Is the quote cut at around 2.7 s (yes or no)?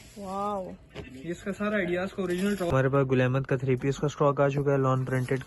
yes